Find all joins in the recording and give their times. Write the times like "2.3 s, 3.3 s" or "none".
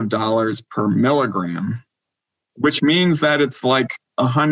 none